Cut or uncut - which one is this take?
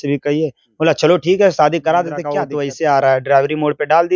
cut